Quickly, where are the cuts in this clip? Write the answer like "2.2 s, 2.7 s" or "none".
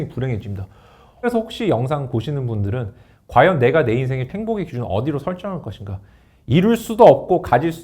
1.3 s, 4.3 s

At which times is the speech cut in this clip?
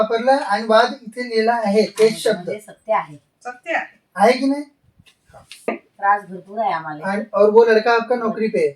5.7 s

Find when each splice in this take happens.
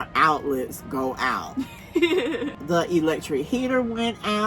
2.5 s

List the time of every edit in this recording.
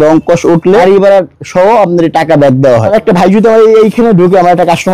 0.8 s, 2.9 s

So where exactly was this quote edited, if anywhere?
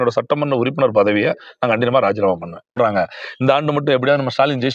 2.8 s

